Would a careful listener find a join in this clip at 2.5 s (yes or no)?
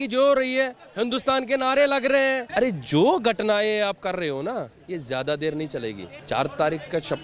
yes